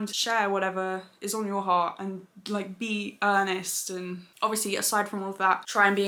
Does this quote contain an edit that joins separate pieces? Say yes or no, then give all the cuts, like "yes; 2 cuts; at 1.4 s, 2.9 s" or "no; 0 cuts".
no; 0 cuts